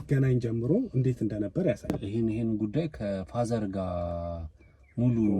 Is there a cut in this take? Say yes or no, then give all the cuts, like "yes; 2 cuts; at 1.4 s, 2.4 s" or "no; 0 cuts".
yes; 1 cut; at 1.9 s